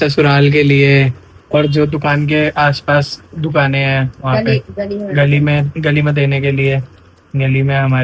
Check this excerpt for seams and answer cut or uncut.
uncut